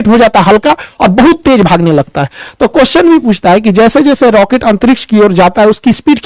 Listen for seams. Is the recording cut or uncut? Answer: uncut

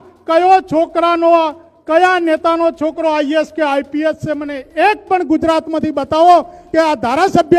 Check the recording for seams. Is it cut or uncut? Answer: uncut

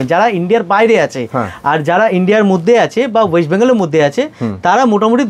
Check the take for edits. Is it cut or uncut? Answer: uncut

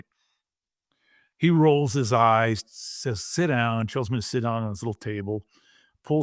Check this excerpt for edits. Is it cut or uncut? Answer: uncut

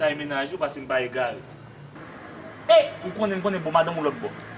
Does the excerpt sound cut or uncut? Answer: cut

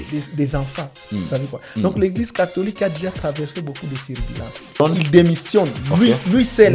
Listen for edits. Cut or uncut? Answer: cut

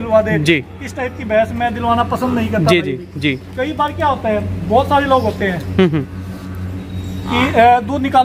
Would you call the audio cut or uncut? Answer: uncut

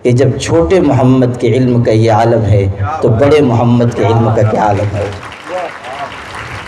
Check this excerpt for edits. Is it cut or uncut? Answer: uncut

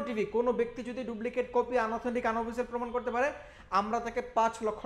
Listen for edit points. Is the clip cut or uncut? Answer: uncut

